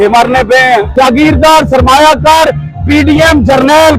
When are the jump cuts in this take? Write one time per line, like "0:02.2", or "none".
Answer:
0:00.9